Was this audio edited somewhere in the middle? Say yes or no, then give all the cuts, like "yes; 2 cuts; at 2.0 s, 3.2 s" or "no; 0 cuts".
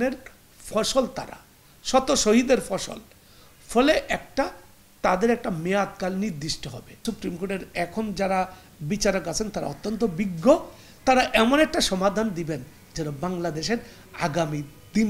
yes; 1 cut; at 7.0 s